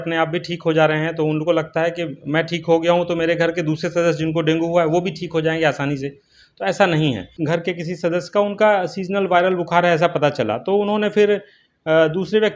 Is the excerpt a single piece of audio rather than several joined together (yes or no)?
no